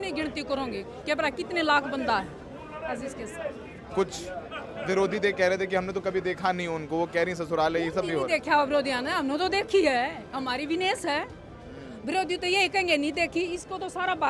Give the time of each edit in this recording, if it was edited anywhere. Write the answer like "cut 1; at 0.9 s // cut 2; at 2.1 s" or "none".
cut 1; at 3.7 s